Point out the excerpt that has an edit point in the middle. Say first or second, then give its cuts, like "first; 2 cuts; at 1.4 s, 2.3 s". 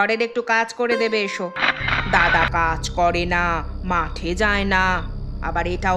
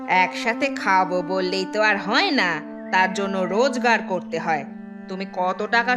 first; 1 cut; at 1.7 s